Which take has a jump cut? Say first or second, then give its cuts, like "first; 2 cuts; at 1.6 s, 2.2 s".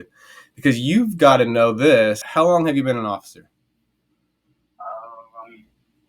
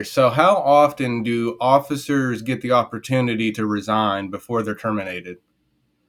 first; 1 cut; at 2.2 s